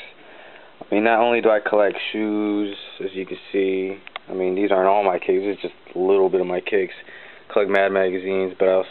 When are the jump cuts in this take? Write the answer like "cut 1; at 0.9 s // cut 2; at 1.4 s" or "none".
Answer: cut 1; at 3.5 s